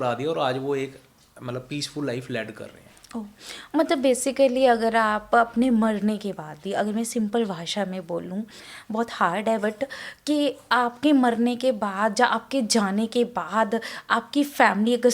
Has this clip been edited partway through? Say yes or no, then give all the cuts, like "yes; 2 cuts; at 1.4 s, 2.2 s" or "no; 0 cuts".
no; 0 cuts